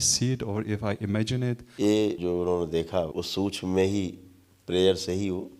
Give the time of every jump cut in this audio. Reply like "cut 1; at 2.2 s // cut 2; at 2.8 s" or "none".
cut 1; at 1.7 s // cut 2; at 2.2 s // cut 3; at 3.1 s